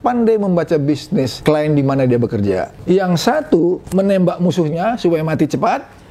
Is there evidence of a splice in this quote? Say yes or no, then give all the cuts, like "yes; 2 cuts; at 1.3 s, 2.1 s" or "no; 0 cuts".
yes; 2 cuts; at 1.3 s, 2.7 s